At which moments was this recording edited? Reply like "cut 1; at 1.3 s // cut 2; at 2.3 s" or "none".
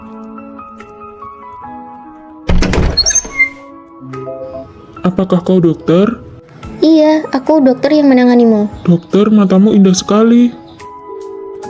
cut 1; at 1.1 s